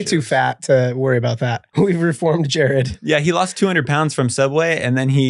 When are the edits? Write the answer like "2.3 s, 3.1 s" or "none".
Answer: 1.6 s

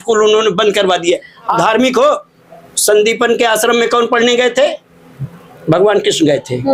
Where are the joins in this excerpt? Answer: 1.6 s

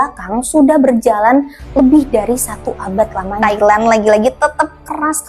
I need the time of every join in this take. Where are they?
3.3 s

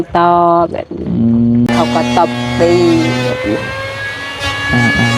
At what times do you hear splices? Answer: 1.7 s

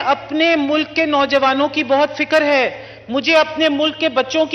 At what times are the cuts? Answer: none

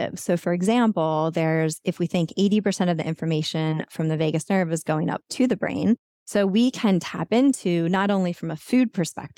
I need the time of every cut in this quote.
6.1 s

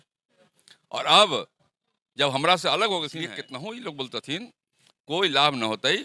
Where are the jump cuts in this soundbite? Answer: 3.1 s

